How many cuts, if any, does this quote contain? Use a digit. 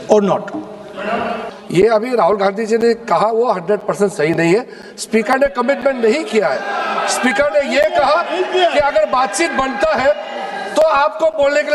1